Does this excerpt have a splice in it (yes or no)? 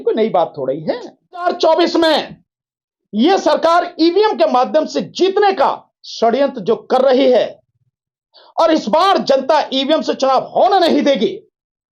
yes